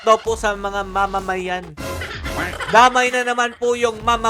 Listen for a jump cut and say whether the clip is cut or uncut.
uncut